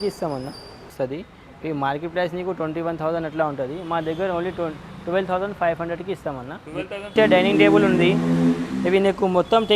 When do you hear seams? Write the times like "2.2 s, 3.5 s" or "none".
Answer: 0.9 s, 7.1 s